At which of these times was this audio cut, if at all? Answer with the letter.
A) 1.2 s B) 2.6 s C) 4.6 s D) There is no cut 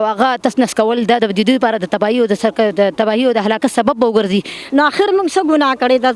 C